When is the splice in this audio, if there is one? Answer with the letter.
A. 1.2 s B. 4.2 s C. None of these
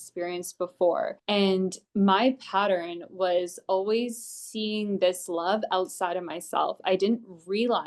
A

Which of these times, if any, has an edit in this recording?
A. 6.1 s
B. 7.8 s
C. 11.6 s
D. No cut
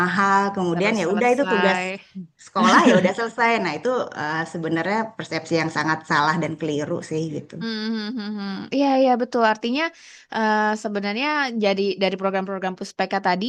D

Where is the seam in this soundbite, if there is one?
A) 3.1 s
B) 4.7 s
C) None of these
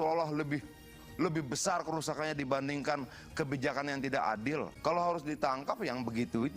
B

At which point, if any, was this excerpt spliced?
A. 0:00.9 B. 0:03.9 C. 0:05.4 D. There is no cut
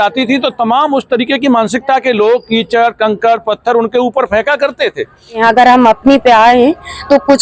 C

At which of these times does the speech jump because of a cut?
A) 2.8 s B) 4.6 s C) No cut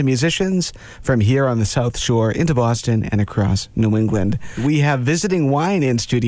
B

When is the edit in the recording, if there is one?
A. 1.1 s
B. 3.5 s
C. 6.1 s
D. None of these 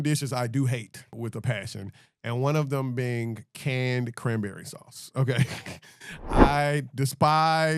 A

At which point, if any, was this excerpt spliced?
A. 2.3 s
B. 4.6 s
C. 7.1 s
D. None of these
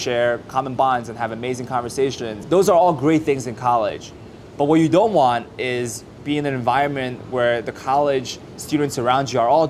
A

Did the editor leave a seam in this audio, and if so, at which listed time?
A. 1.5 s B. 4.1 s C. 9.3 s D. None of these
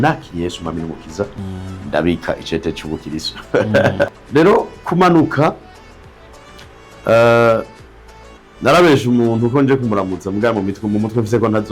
B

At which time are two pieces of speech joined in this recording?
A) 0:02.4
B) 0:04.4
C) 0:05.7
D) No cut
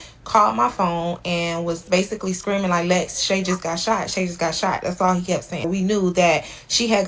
C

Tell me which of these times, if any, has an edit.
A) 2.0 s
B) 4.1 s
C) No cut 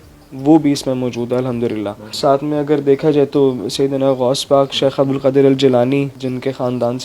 C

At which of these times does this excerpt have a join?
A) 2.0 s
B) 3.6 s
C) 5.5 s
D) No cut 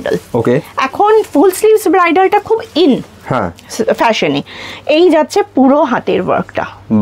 D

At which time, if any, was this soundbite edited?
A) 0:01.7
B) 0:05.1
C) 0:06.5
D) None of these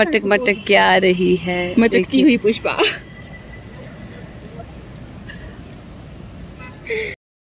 D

